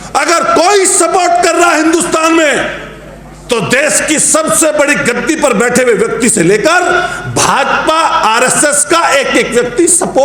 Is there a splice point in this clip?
no; 0 cuts

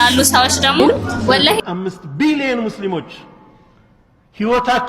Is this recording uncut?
no; 1 cut; at 1.6 s

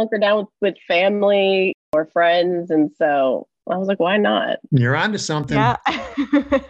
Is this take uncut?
no; 2 cuts; at 4.6 s, 5.6 s

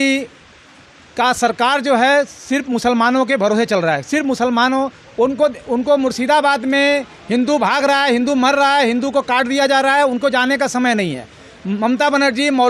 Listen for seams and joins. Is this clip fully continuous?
yes; 0 cuts

